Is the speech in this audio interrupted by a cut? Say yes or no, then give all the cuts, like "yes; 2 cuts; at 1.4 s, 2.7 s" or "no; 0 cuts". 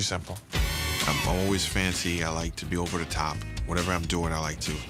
no; 0 cuts